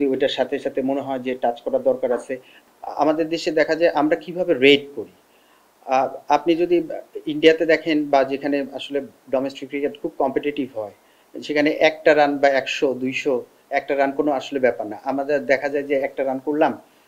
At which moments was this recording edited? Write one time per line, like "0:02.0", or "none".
0:02.5